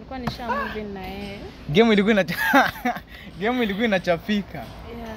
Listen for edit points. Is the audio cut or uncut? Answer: uncut